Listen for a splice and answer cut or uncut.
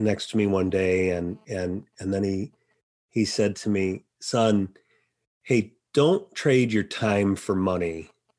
uncut